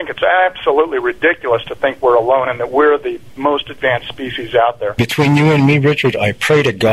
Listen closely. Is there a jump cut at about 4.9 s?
yes; 1 cut; at 4.9 s

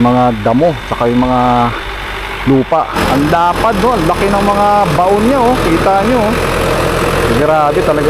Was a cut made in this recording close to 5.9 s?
no; 1 cut; at 2.9 s

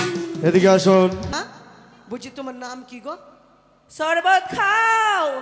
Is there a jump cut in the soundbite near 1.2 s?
yes; 1 cut; at 1.2 s

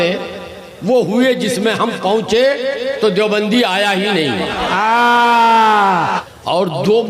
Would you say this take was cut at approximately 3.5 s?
no; 1 cut; at 6.2 s

